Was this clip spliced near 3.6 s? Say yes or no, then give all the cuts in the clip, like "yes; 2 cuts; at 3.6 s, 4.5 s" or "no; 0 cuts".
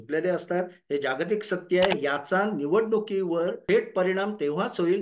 yes; 2 cuts; at 1.9 s, 3.6 s